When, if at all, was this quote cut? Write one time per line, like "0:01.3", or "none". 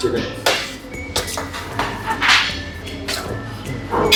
none